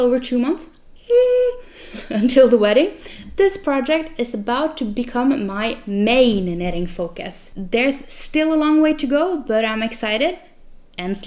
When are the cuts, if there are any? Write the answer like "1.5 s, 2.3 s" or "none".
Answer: none